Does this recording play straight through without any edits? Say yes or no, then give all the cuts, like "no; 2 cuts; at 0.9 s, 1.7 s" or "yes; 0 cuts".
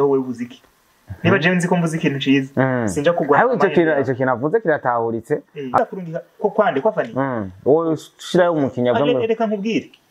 no; 1 cut; at 5.8 s